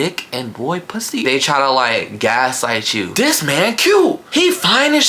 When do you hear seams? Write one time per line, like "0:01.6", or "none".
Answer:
0:01.2
0:03.0
0:04.2